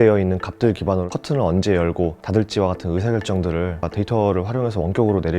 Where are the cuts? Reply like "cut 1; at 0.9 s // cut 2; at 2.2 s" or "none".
cut 1; at 1.1 s